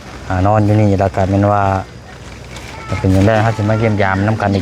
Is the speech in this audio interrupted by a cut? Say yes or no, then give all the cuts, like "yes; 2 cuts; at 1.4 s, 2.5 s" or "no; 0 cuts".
no; 0 cuts